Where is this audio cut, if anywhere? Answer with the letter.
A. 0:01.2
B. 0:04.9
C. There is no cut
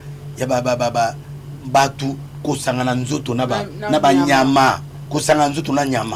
B